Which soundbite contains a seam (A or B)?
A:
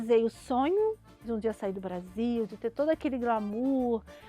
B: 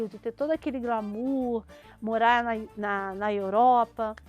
A